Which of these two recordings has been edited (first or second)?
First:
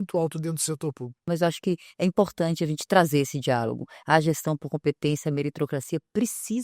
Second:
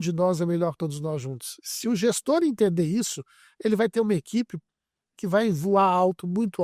first